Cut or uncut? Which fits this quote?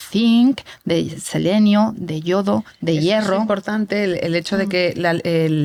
uncut